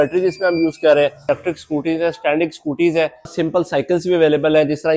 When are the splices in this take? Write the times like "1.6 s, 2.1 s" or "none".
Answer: 1.3 s, 3.3 s